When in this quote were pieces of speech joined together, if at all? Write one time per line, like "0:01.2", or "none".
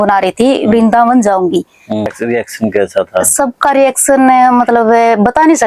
0:02.1